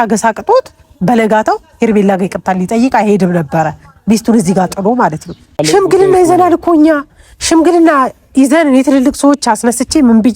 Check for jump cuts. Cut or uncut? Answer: cut